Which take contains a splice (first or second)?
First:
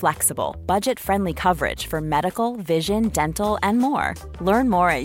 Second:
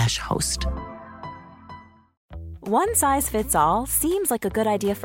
second